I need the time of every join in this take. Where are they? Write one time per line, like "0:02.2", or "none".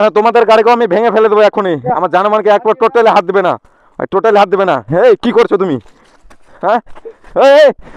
none